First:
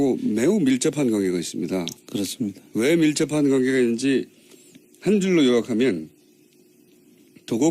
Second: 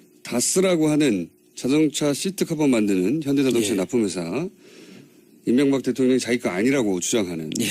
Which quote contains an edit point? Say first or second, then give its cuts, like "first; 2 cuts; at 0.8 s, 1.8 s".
first; 1 cut; at 2.8 s